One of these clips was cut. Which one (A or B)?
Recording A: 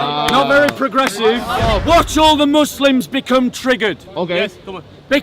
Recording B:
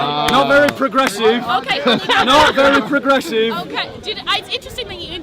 A